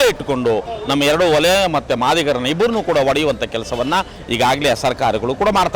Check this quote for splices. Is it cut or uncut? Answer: uncut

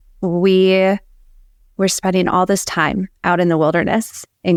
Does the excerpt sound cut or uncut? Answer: uncut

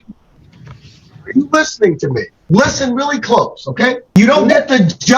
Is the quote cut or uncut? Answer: cut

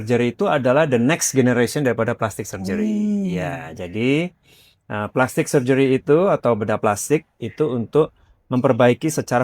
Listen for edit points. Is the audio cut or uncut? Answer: uncut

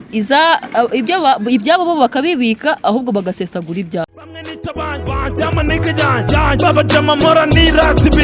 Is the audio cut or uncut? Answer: cut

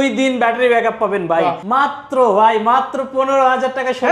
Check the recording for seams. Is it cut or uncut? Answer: cut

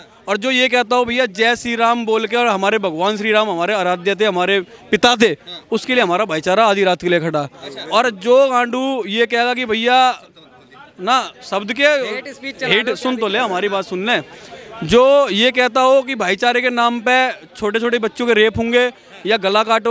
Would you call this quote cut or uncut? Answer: uncut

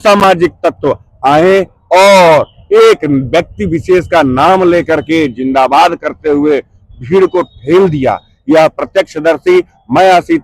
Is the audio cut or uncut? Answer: uncut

